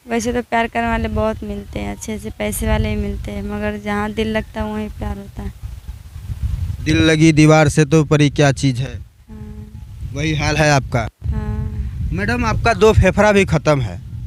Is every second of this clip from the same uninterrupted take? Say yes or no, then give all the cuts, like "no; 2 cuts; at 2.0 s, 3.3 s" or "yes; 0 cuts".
yes; 0 cuts